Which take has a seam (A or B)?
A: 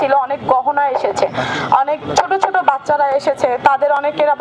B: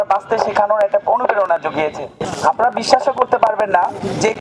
B